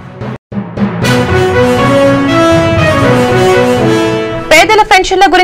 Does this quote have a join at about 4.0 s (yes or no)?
yes